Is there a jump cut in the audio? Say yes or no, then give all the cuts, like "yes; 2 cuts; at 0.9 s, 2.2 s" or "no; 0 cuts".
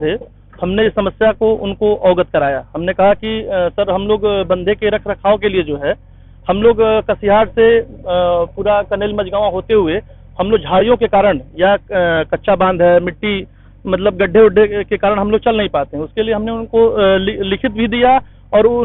no; 0 cuts